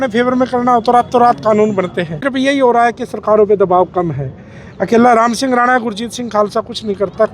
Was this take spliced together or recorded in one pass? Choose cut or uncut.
cut